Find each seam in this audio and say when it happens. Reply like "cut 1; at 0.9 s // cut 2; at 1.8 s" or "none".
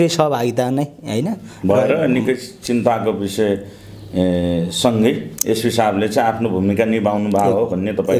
none

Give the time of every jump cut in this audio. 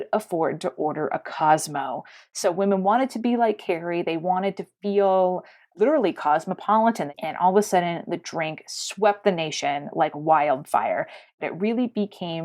cut 1; at 7.1 s // cut 2; at 11.4 s

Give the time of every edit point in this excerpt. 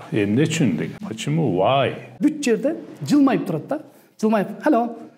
cut 1; at 1.1 s // cut 2; at 2.2 s

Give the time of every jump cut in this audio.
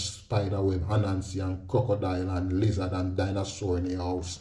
none

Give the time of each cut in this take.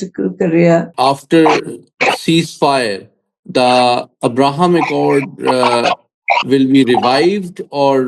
cut 1; at 0.9 s

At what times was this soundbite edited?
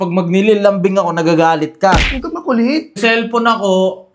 cut 1; at 3.0 s

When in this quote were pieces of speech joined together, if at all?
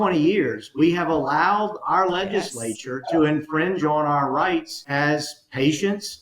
cut 1; at 4.8 s

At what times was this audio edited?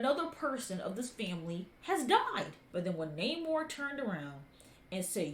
cut 1; at 2.6 s

